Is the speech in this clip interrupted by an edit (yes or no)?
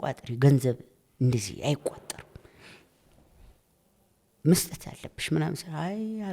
no